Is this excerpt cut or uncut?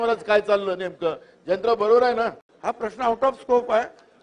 cut